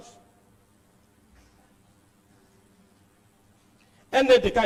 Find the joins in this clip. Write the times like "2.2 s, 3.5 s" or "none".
none